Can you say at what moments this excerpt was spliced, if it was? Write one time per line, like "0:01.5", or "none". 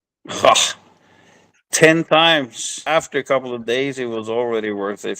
0:02.8

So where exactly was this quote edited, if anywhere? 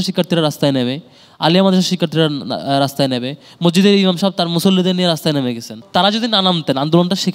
0:05.8

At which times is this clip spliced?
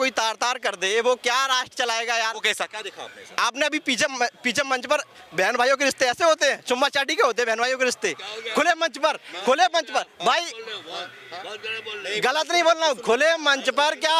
none

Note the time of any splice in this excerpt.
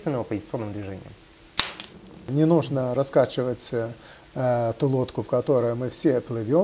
0:01.8

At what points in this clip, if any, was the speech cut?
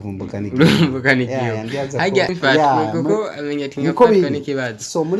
0:02.3

